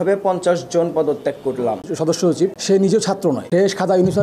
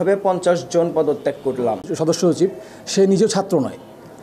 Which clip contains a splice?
first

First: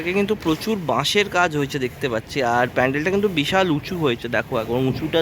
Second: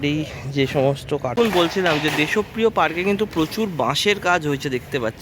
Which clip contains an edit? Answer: second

